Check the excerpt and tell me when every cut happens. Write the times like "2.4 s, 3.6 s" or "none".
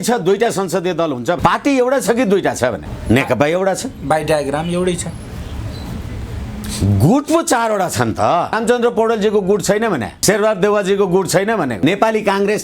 1.4 s, 2.9 s, 8.6 s, 10.1 s, 11.7 s